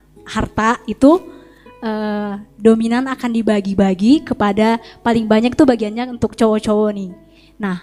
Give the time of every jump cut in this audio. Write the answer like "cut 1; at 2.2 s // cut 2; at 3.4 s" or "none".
none